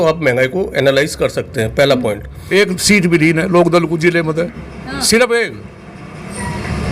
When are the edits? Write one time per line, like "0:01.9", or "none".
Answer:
0:02.3